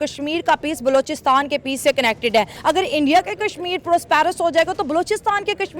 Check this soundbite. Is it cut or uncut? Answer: cut